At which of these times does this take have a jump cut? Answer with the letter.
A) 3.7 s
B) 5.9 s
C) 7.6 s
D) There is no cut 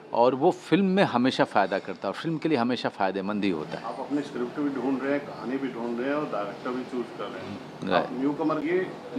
D